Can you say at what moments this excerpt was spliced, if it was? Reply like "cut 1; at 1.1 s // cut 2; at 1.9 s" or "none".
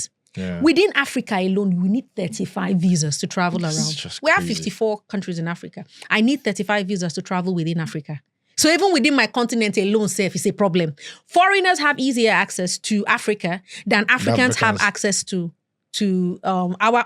none